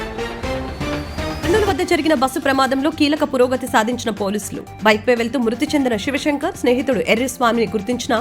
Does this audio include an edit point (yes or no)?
yes